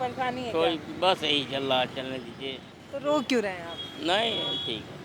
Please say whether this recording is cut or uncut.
cut